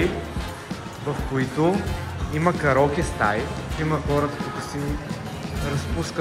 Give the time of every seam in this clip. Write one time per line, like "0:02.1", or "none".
0:03.7